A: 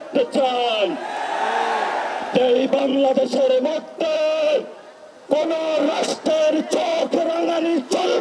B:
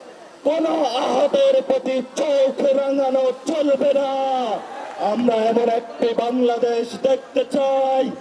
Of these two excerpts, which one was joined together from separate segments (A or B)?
B